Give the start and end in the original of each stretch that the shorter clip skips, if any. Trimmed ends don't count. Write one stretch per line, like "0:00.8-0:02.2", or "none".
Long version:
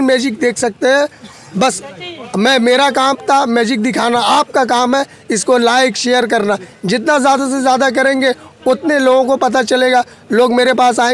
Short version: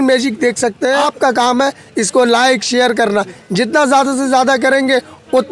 0:01.1-0:04.4